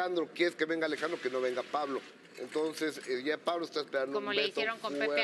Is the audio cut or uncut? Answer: uncut